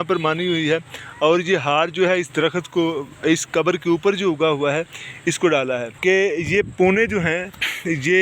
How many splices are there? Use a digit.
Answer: 1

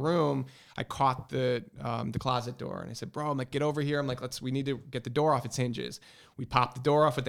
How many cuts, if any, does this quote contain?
0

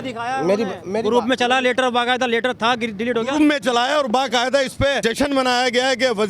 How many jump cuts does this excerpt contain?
1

